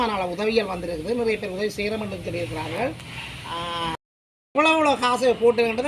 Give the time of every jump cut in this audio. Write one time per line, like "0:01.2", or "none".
0:04.0